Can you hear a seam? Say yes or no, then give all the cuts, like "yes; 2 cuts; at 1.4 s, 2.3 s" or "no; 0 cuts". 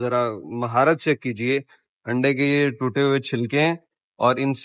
no; 0 cuts